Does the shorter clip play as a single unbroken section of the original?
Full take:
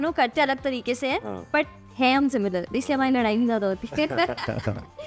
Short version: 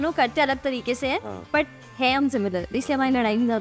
yes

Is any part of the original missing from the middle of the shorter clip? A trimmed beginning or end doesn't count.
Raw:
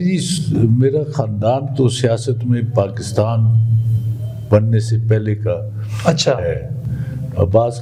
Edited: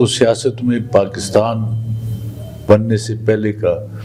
no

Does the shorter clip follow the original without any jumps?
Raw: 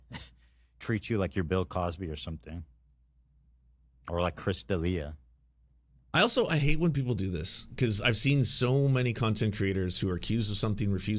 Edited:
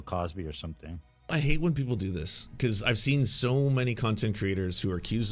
no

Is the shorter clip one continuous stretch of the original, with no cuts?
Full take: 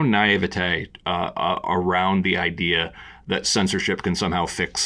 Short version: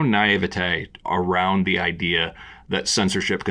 no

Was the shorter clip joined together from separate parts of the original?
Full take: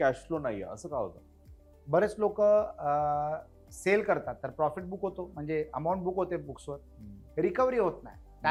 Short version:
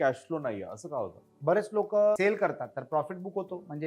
yes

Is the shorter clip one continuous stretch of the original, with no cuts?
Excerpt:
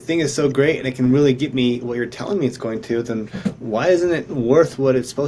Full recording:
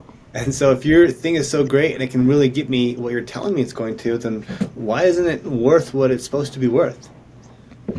yes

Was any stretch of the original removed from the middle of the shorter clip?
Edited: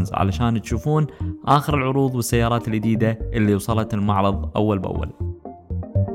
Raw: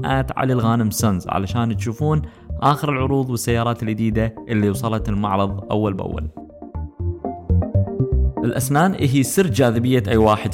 yes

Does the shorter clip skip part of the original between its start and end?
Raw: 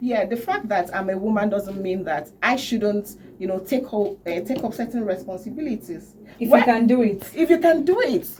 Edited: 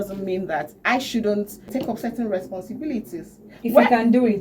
yes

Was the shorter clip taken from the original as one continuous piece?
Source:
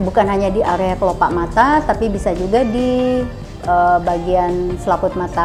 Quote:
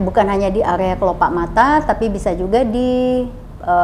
yes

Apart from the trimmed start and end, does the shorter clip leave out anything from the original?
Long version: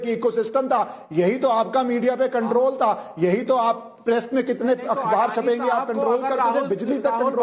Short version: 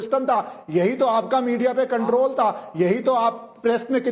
no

